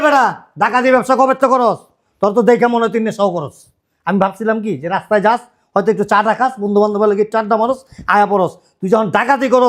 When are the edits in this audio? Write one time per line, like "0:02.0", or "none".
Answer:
none